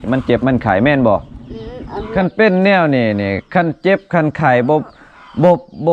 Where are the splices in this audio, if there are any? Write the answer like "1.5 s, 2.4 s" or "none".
2.0 s

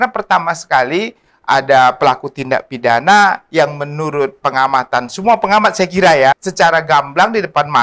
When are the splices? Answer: 6.4 s

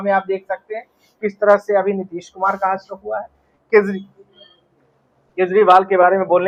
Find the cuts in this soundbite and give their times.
none

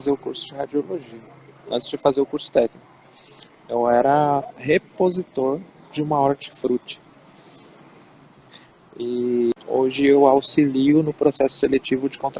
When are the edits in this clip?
9.5 s

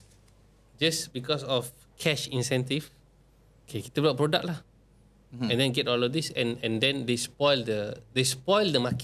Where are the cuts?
none

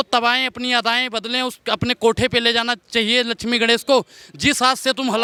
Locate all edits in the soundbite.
none

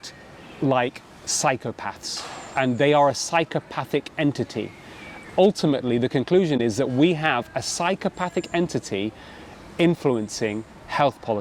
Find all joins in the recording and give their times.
5.1 s

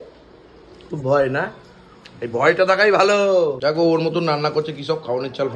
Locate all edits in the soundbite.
3.6 s

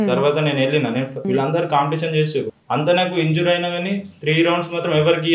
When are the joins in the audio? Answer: 1.2 s, 2.6 s

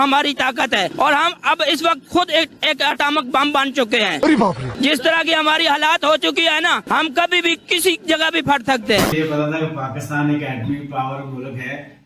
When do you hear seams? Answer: 9.1 s

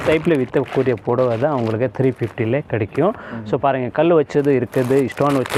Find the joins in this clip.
none

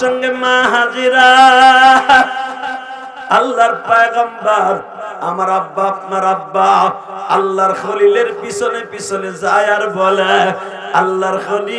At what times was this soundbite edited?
none

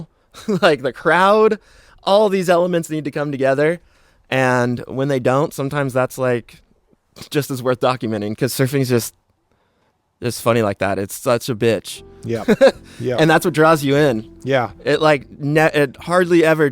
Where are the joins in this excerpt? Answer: 8.3 s

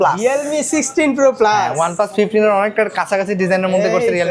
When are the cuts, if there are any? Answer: none

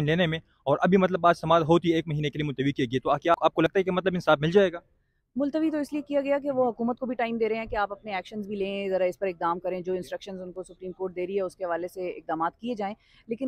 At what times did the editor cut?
3.7 s

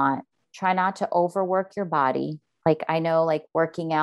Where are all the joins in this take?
none

